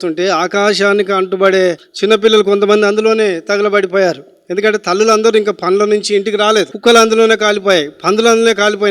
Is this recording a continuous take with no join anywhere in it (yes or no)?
no